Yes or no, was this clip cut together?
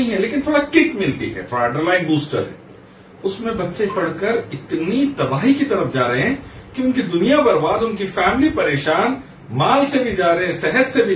no